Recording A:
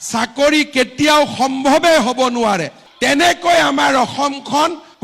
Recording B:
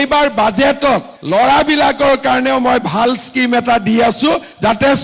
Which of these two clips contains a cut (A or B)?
A